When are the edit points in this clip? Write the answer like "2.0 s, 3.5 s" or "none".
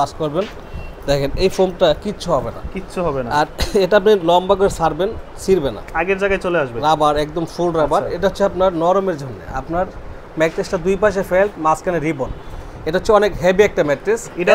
none